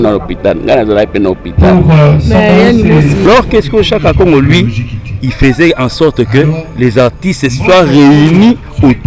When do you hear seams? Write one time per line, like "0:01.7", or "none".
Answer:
0:03.3